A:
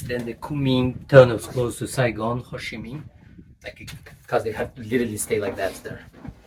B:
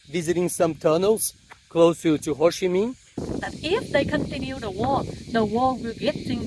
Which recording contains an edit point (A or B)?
B